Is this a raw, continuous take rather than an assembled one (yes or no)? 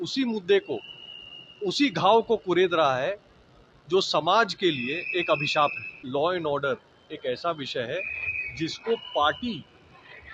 no